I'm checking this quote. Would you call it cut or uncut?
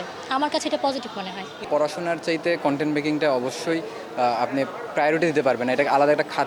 cut